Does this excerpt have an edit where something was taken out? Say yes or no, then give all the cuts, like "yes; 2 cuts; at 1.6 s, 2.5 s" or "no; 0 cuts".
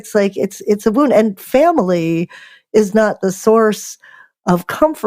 no; 0 cuts